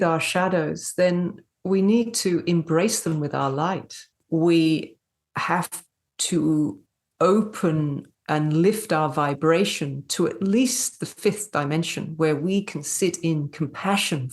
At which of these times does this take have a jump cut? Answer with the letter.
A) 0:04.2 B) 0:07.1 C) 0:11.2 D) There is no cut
A